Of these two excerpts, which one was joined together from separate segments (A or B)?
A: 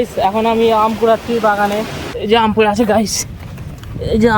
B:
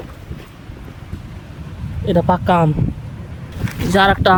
A